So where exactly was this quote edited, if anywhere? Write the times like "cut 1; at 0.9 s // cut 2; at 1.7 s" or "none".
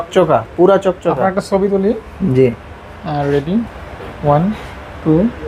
none